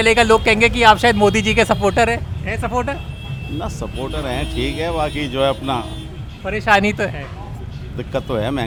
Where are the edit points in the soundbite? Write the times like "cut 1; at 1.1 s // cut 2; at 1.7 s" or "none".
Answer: none